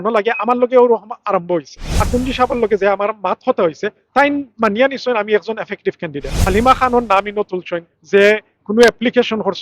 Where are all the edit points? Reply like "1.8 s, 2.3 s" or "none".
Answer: 2.0 s, 6.3 s